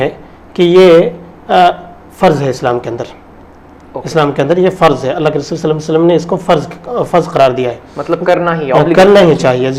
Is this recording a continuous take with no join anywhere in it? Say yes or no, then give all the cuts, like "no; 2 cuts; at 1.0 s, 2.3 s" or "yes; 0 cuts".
yes; 0 cuts